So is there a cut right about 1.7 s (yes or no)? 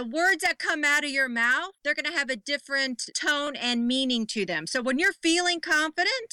yes